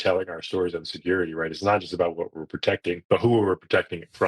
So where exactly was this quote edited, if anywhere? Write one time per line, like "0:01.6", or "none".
0:03.0